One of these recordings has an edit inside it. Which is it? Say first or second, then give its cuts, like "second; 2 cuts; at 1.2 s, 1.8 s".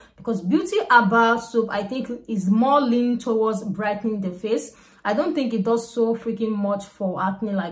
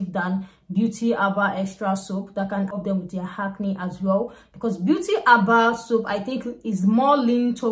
second; 1 cut; at 2.7 s